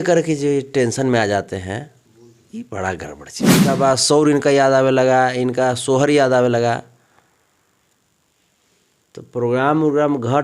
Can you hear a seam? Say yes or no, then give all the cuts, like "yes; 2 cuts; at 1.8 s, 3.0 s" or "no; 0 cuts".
yes; 1 cut; at 3.6 s